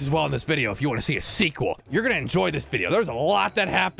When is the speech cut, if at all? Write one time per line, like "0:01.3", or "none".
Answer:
0:01.8